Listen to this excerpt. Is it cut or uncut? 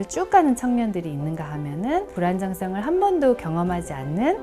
cut